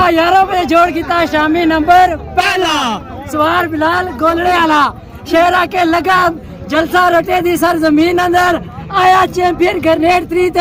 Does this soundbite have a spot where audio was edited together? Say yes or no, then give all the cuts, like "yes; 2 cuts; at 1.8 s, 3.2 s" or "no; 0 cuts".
no; 0 cuts